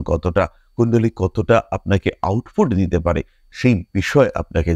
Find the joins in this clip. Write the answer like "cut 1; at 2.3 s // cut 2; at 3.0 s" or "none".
none